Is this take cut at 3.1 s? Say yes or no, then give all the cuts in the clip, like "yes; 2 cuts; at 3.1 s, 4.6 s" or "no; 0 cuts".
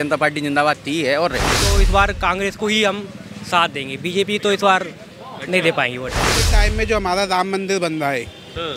no; 2 cuts; at 1.6 s, 6.5 s